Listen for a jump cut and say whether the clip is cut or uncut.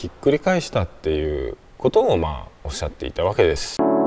uncut